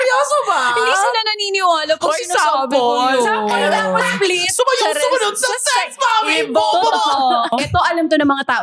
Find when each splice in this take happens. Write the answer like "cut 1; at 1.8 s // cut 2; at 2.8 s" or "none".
cut 1; at 7.5 s